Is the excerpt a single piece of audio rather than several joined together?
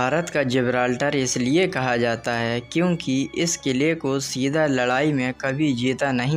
yes; 0 cuts

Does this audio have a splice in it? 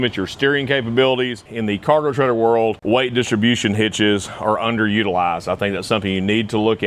yes; 2 cuts; at 1.5 s, 2.8 s

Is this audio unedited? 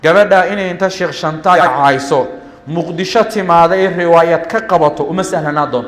yes; 0 cuts

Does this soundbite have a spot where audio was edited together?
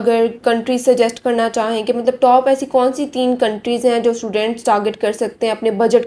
no; 0 cuts

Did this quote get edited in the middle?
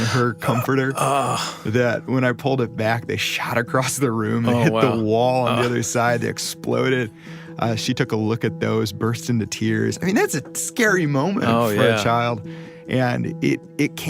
no; 0 cuts

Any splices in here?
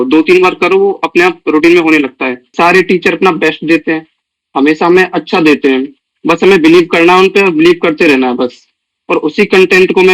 yes; 1 cut; at 2.5 s

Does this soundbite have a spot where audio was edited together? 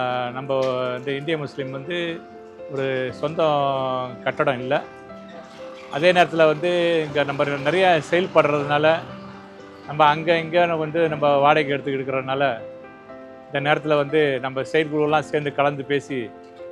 no; 0 cuts

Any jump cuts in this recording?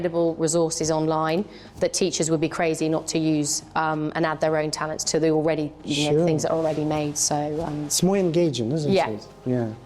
no; 0 cuts

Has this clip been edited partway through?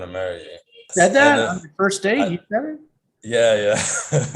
yes; 1 cut; at 0.9 s

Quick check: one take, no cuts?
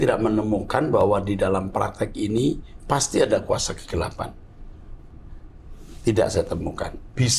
yes; 0 cuts

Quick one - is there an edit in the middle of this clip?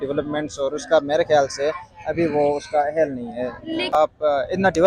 yes; 1 cut; at 4.0 s

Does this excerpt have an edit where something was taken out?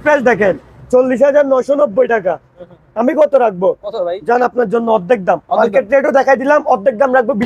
no; 0 cuts

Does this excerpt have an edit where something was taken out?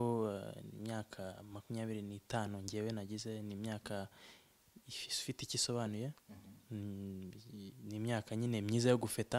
no; 0 cuts

